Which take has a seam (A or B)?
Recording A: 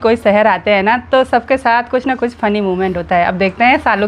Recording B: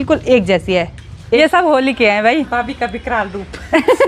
B